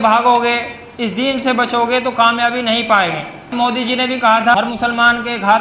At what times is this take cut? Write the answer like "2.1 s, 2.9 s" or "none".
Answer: 3.5 s, 4.5 s